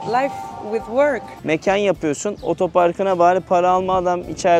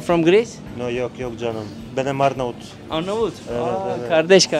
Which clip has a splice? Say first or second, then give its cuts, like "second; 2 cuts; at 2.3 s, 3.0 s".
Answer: first; 1 cut; at 1.3 s